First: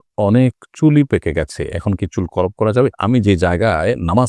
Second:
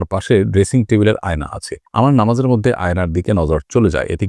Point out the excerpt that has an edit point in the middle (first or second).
first